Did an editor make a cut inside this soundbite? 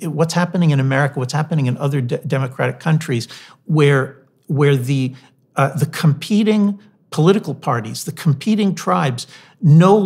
no; 0 cuts

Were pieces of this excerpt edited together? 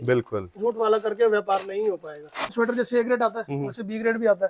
yes; 1 cut; at 2.5 s

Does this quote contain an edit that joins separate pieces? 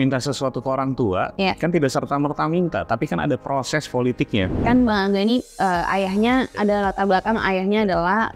yes; 2 cuts; at 1.3 s, 4.5 s

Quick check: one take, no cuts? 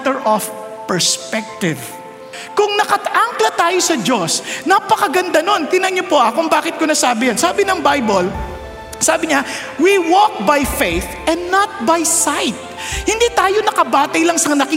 no; 1 cut; at 2.4 s

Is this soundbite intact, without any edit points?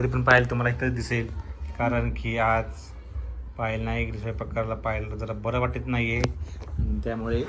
yes; 0 cuts

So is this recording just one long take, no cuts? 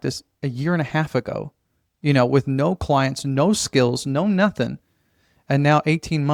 yes; 0 cuts

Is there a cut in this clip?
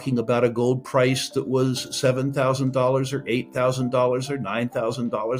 no; 0 cuts

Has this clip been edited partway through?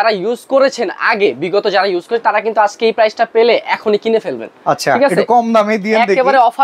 no; 0 cuts

